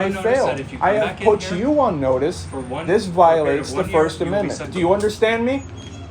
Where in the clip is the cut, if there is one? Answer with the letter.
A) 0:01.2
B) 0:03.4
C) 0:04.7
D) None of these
C